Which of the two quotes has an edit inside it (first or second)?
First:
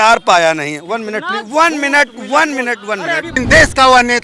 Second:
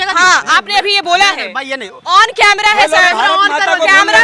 first